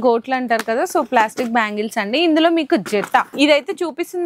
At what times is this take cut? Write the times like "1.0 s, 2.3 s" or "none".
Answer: 3.3 s